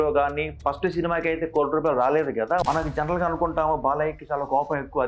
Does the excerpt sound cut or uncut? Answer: cut